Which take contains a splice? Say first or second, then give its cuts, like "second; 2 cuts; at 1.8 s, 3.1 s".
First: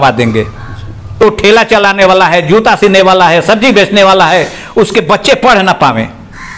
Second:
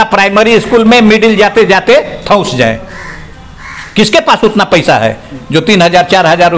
first; 1 cut; at 1.2 s